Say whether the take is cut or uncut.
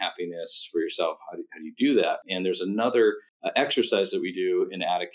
cut